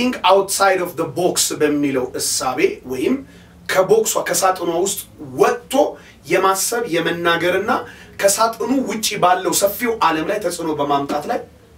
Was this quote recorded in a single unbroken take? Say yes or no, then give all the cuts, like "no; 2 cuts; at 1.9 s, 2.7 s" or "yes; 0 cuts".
yes; 0 cuts